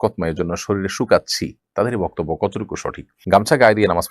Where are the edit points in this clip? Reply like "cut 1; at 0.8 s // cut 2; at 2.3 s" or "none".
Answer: cut 1; at 3.2 s